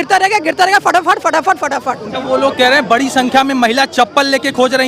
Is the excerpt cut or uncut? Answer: cut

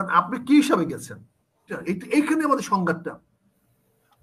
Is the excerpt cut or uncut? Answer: cut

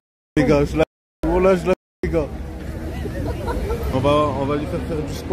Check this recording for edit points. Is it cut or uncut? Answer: cut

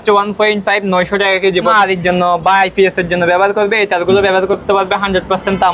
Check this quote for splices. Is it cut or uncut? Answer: cut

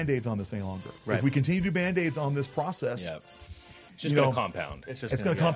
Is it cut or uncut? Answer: uncut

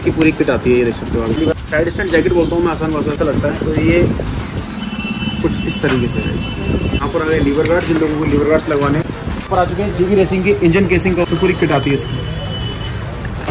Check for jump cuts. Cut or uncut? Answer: cut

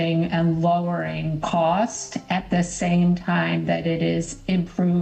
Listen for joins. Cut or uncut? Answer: uncut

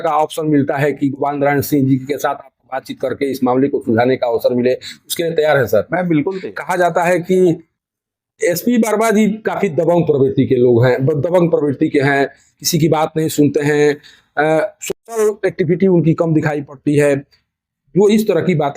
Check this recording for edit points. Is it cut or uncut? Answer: cut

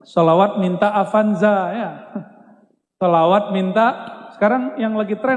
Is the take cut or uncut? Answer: uncut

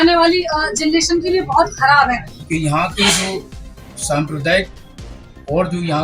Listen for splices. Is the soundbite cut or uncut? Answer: cut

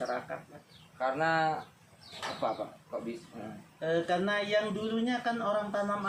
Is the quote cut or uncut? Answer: uncut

